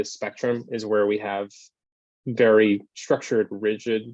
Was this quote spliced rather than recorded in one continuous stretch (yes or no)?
yes